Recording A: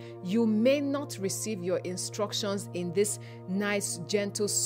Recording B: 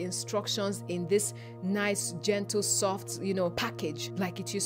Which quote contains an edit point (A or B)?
B